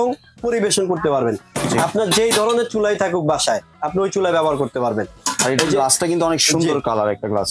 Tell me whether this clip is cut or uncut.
uncut